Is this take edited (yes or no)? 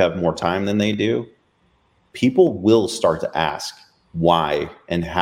no